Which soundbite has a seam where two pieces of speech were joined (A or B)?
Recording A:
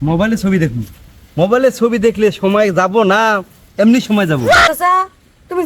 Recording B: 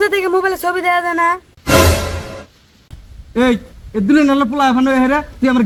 A